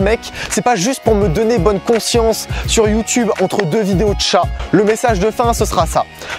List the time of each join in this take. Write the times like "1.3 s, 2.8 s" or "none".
4.6 s